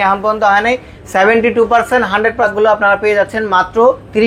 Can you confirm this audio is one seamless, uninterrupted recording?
no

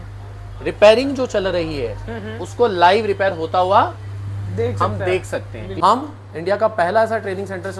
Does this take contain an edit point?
yes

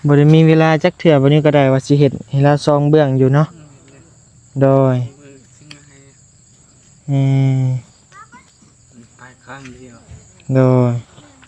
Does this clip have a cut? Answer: no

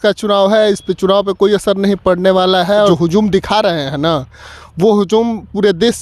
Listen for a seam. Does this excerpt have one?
yes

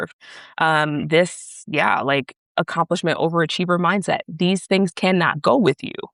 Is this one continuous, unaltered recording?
yes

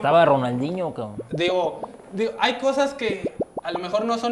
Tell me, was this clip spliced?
no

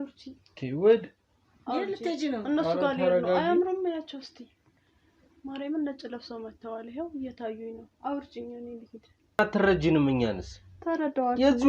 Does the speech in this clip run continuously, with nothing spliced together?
no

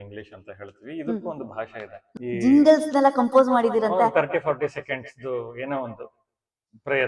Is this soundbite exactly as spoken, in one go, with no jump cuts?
no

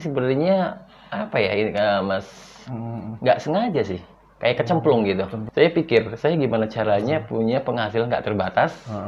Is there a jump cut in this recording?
yes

